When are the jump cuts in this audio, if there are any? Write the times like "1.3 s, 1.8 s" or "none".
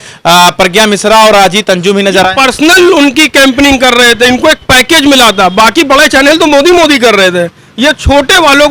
none